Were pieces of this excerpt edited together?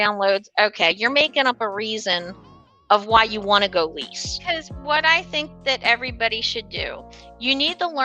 yes; 1 cut; at 4.5 s

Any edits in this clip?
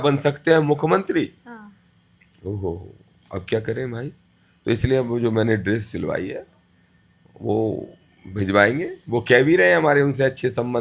no; 0 cuts

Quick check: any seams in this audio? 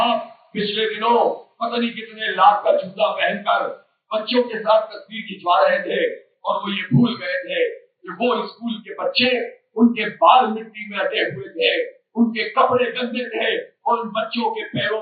no; 0 cuts

